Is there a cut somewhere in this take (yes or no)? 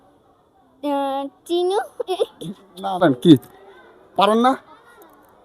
yes